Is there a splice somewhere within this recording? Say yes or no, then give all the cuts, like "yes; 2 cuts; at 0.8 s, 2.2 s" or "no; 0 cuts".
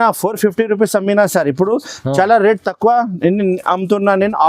no; 0 cuts